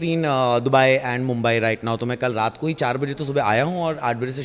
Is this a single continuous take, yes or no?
yes